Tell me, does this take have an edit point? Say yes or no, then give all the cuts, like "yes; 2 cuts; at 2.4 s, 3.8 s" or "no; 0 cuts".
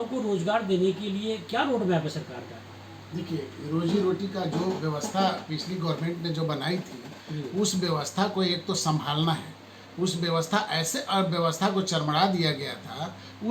no; 0 cuts